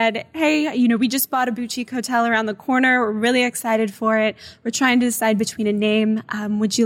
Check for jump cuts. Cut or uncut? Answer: uncut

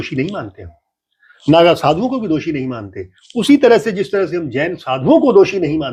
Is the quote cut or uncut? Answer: uncut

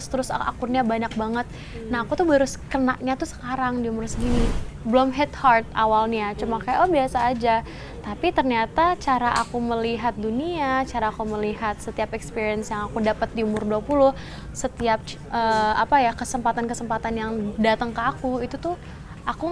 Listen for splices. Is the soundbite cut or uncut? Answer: cut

